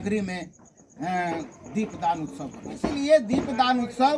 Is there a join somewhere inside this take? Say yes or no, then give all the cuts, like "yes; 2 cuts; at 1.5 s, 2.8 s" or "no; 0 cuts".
yes; 1 cut; at 2.9 s